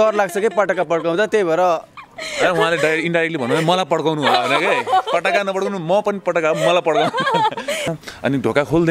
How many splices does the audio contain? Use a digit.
1